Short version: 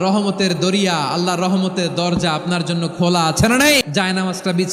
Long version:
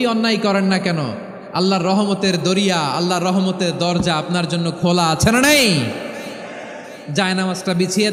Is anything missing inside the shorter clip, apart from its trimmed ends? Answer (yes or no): yes